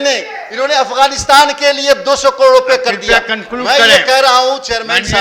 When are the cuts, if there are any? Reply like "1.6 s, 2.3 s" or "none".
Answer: none